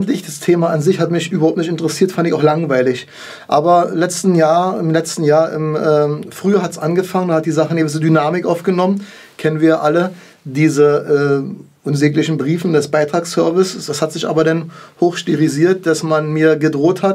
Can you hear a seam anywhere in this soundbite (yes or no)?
yes